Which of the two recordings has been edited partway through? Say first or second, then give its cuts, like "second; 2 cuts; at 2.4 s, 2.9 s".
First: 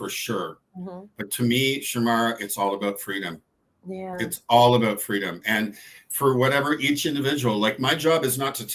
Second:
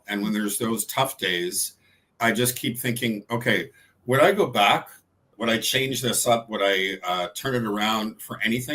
second; 1 cut; at 5.3 s